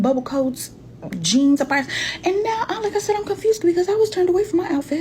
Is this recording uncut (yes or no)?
yes